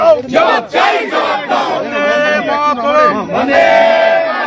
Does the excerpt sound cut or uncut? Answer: uncut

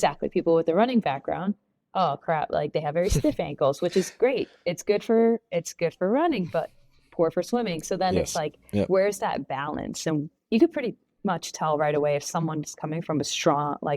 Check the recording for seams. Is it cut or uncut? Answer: cut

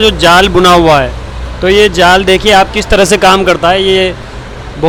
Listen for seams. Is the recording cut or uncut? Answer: uncut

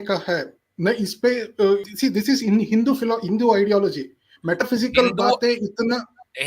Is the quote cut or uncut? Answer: cut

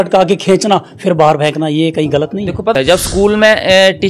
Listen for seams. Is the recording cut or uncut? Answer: cut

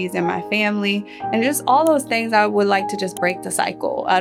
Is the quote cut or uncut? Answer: uncut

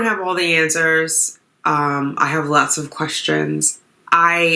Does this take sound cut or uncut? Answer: uncut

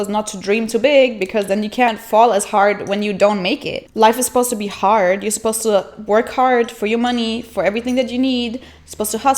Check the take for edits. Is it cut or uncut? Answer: uncut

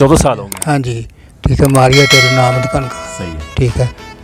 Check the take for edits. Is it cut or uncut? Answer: uncut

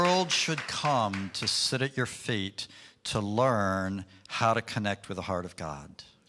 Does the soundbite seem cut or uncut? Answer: uncut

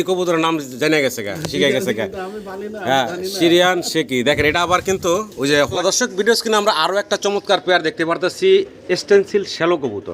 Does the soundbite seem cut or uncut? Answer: cut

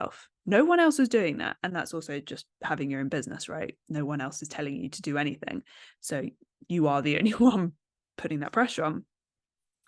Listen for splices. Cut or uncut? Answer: uncut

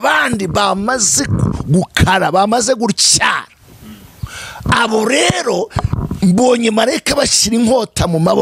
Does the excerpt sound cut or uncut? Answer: uncut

